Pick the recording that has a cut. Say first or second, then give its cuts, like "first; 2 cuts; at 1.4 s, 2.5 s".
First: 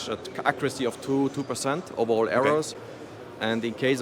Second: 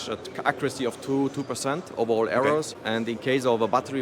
second; 1 cut; at 2.8 s